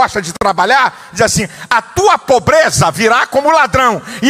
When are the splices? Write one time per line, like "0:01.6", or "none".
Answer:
none